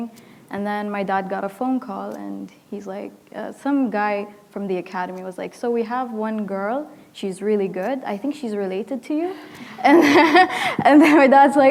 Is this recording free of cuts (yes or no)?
yes